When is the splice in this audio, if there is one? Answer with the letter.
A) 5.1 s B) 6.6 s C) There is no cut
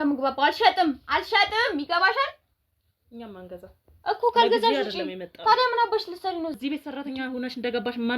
B